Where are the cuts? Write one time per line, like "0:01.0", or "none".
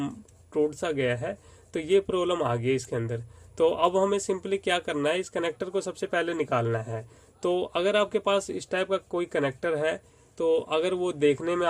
none